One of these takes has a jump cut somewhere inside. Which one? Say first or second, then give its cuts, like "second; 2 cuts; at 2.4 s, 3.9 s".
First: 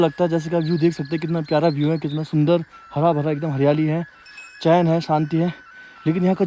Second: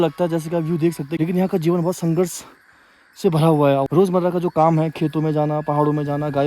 second; 2 cuts; at 1.1 s, 3.9 s